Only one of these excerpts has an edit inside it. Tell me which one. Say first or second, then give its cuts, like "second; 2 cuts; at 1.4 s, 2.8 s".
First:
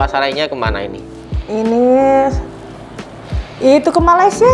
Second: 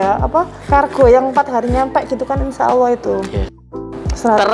second; 1 cut; at 3.6 s